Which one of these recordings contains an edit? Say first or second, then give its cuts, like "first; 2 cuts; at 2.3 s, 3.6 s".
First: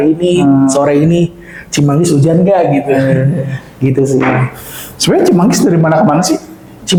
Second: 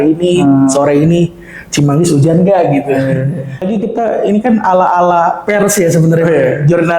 second; 1 cut; at 3.7 s